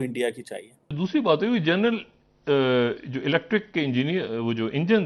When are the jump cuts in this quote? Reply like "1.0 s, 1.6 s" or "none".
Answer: 0.9 s

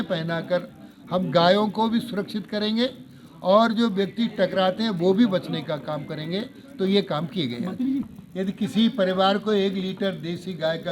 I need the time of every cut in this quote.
8.2 s

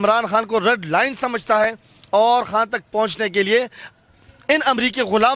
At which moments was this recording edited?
none

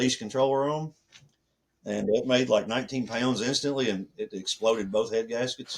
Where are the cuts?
none

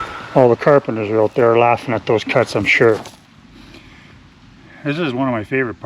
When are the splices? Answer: 3.0 s

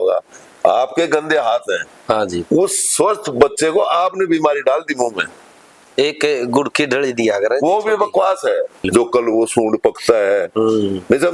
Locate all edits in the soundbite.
8.8 s

